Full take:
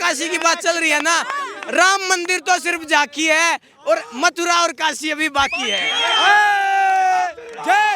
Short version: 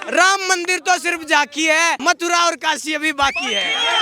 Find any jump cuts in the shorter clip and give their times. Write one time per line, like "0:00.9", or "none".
0:02.0